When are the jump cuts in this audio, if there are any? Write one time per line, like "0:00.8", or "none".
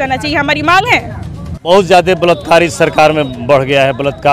0:01.6